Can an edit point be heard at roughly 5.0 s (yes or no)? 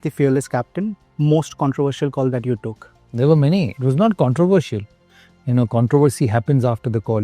no